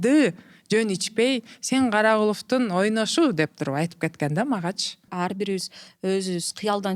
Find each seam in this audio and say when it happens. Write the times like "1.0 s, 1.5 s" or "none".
5.1 s